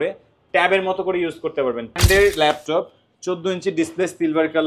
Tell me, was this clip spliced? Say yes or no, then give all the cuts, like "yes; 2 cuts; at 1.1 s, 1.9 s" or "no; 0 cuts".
yes; 1 cut; at 2.0 s